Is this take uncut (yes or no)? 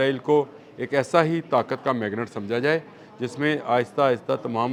yes